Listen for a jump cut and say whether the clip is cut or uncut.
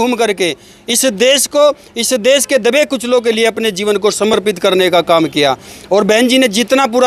uncut